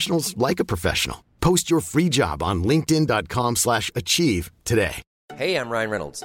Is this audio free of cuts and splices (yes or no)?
no